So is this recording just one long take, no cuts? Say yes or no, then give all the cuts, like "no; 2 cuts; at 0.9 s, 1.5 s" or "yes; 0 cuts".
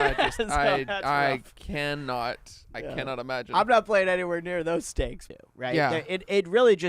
no; 1 cut; at 5.2 s